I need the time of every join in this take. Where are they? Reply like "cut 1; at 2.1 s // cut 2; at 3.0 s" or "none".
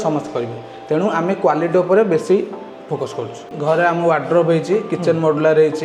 cut 1; at 3.5 s